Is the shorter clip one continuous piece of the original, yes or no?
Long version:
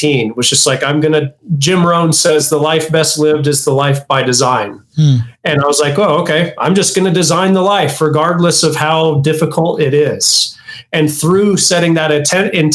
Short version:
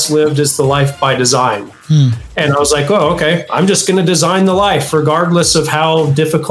yes